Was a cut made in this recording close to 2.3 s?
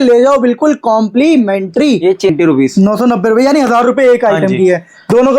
yes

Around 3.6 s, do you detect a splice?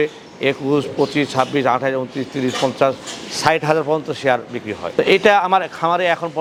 no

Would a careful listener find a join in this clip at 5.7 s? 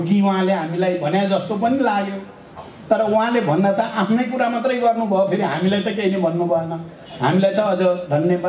no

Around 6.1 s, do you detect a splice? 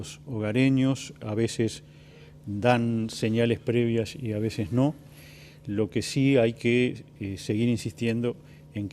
yes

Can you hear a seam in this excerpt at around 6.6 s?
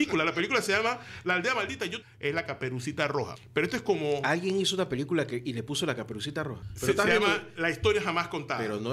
yes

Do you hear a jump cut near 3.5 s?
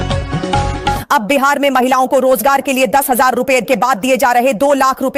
no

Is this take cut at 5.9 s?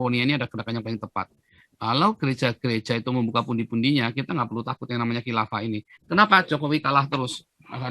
yes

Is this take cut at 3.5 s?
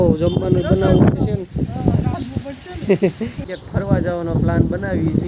yes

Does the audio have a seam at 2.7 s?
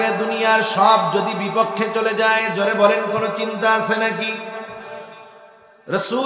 no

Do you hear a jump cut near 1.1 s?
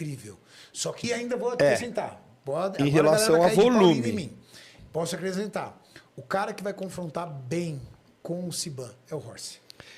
yes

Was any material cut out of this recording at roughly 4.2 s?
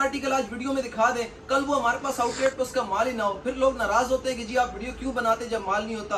no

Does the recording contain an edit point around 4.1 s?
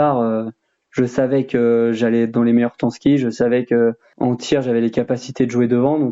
yes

